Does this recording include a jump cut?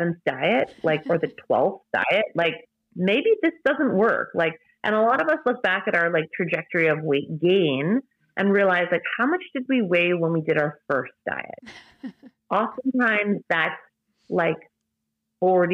no; 0 cuts

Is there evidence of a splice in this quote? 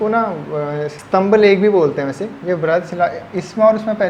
yes; 1 cut; at 1.0 s

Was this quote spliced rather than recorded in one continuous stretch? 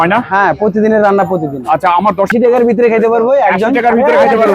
yes; 1 cut; at 2.3 s

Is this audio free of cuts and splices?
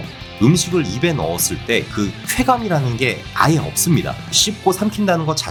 yes; 0 cuts

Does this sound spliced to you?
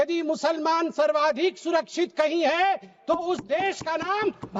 no; 0 cuts

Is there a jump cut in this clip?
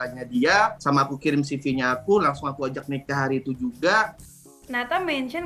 yes; 1 cut; at 4.5 s

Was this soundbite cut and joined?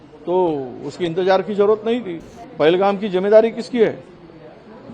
yes; 1 cut; at 2.4 s

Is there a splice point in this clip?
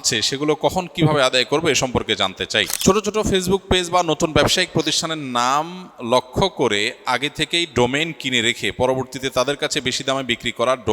yes; 1 cut; at 2.7 s

